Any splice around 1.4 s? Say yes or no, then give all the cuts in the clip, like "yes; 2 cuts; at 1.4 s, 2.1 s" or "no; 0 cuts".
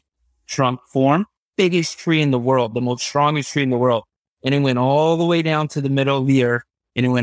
yes; 1 cut; at 1.4 s